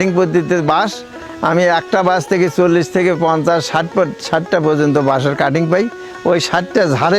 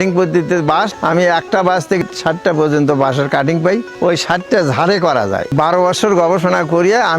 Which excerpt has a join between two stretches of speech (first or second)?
second